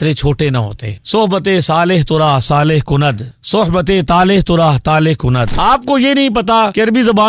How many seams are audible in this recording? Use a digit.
1